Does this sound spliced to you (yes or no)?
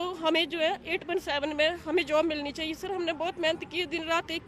no